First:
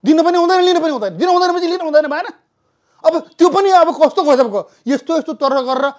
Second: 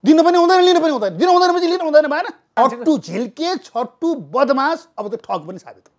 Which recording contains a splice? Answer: second; 1 cut; at 2.4 s

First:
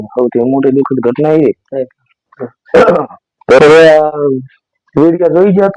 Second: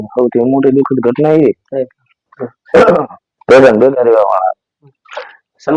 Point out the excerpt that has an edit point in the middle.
first; 1 cut; at 3.6 s

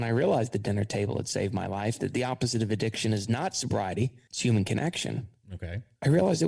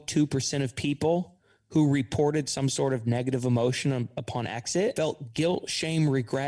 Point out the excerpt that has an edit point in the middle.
second; 1 cut; at 4.9 s

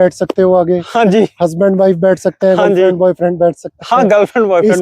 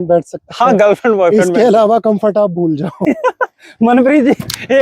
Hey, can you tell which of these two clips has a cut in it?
second; 1 cut; at 2.9 s

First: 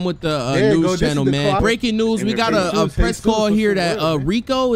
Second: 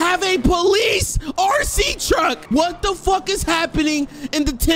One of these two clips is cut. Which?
second; 1 cut; at 2.4 s

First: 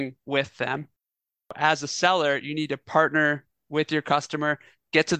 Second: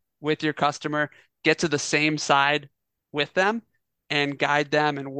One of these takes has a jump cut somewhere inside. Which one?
first; 1 cut; at 1.5 s

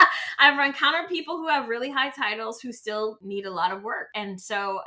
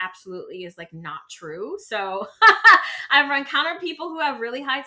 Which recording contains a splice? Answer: first; 2 cuts; at 3.2 s, 4.1 s

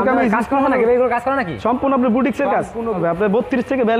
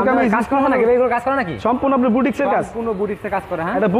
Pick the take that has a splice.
first; 1 cut; at 3.0 s

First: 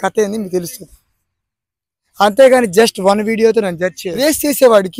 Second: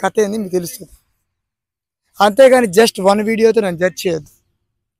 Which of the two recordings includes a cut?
first; 1 cut; at 4.0 s

